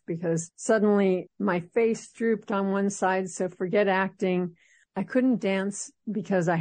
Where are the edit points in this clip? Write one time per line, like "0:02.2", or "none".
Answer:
none